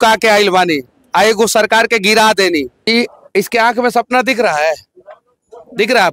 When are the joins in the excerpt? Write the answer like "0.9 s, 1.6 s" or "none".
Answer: 2.9 s